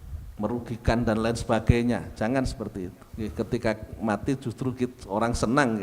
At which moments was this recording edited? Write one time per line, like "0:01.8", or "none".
0:03.0